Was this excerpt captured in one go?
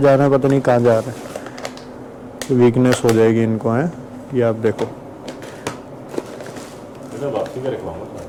yes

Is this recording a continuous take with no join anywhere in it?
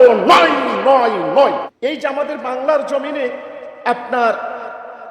no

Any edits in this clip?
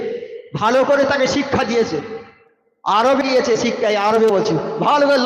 no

